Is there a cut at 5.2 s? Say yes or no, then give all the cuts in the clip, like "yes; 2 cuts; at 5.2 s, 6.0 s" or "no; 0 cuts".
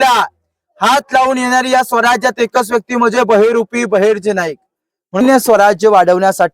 yes; 1 cut; at 5.2 s